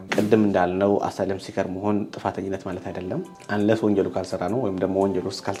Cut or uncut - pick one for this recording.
uncut